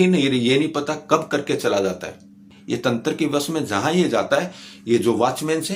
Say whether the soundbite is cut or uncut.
cut